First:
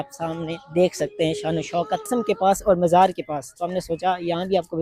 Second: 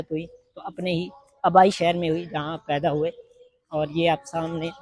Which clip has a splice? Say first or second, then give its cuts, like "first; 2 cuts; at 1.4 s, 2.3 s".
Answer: first; 1 cut; at 2.1 s